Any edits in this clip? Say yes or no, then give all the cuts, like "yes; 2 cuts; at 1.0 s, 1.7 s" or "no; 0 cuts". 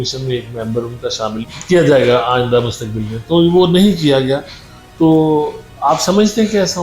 no; 0 cuts